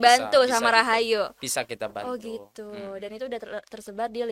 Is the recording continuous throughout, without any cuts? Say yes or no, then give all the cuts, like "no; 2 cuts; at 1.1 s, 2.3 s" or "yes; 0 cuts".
yes; 0 cuts